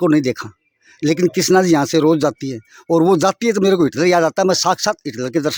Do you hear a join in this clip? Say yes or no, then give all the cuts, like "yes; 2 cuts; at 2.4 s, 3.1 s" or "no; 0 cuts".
no; 0 cuts